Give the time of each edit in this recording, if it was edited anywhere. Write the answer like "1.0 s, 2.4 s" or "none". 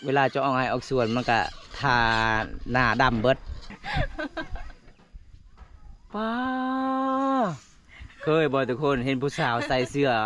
3.7 s